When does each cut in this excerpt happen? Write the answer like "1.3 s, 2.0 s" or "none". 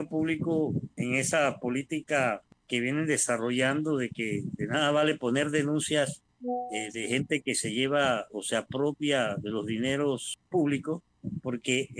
0.9 s, 2.5 s, 6.3 s, 10.3 s